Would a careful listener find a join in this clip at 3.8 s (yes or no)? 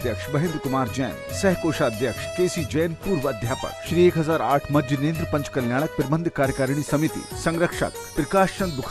yes